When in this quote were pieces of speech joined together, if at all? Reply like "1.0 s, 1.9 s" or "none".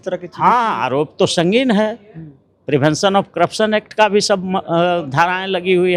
none

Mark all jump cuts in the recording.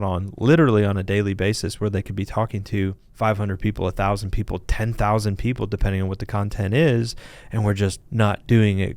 8.0 s

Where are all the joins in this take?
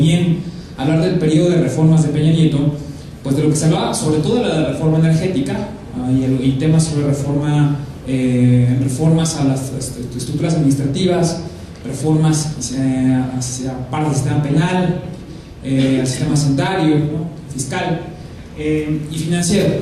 17.1 s

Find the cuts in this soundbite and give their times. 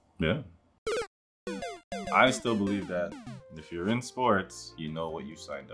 2.1 s, 4.6 s

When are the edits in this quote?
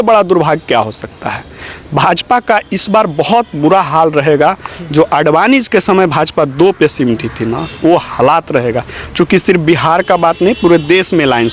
none

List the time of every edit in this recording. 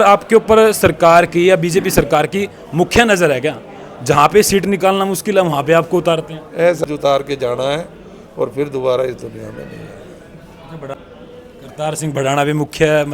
6.8 s, 10.9 s

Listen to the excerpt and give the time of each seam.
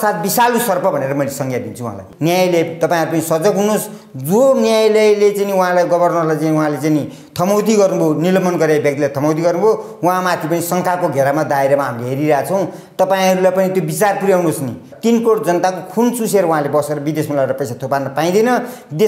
2.1 s, 14.9 s

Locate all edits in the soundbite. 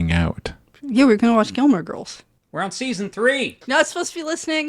3.6 s

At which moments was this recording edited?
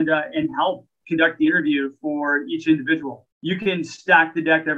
3.3 s

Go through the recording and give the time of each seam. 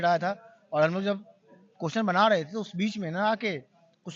none

